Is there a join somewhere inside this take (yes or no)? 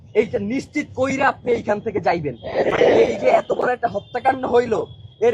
yes